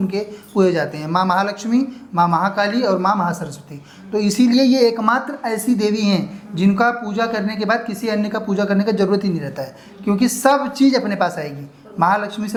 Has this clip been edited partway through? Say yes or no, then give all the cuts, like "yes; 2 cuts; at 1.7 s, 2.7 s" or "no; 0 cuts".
no; 0 cuts